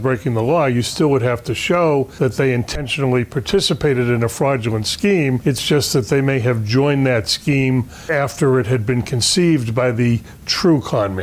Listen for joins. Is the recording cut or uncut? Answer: cut